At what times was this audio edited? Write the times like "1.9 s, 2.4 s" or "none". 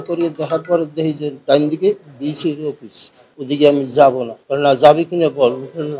3.3 s